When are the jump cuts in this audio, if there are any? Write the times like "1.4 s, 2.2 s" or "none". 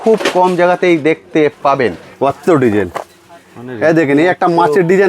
2.0 s

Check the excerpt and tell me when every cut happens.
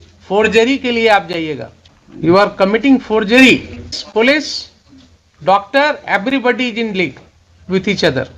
2.3 s, 4.0 s

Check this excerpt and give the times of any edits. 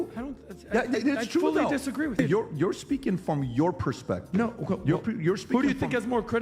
2.2 s

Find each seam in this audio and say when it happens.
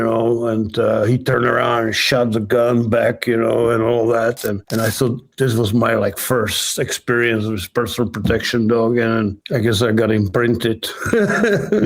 4.6 s, 9.4 s

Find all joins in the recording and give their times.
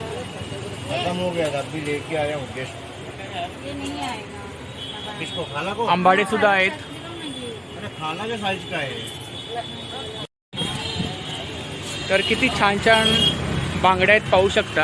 10.2 s

